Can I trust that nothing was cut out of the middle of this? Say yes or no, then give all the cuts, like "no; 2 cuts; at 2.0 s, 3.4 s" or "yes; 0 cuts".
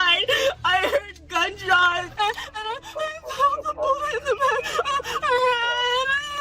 no; 1 cut; at 2.1 s